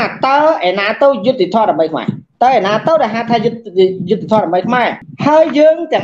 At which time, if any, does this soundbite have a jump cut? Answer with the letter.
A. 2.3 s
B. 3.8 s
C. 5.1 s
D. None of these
C